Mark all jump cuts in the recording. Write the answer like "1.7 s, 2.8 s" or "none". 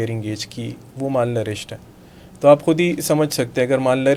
none